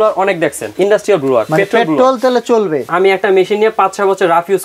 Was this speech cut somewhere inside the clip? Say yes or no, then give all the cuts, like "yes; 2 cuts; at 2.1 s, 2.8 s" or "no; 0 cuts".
yes; 1 cut; at 2.9 s